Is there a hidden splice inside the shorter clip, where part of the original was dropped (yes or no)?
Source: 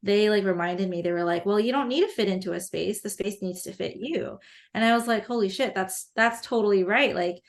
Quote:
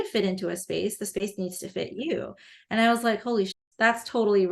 yes